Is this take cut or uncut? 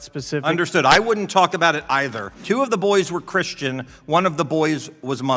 cut